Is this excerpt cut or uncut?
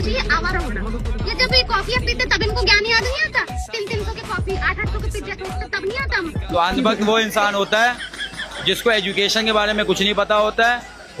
uncut